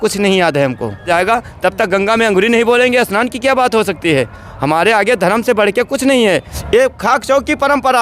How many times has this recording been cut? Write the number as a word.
two